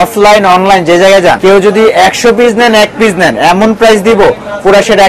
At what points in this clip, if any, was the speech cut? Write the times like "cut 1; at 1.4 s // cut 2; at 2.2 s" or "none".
cut 1; at 1.4 s